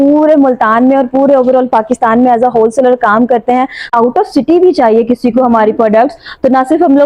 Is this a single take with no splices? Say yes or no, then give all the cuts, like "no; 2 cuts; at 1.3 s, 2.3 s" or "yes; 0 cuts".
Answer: no; 1 cut; at 3.9 s